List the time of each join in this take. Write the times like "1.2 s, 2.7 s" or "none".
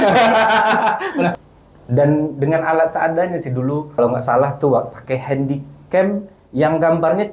1.3 s, 4.0 s